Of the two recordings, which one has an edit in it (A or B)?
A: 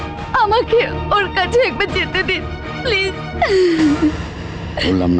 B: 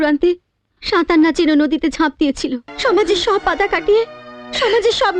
B